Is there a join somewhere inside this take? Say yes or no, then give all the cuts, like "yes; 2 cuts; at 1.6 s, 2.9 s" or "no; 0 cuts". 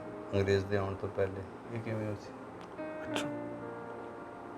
no; 0 cuts